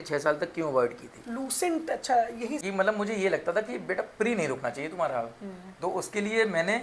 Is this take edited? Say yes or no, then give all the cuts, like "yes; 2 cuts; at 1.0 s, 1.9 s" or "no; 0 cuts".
yes; 1 cut; at 2.6 s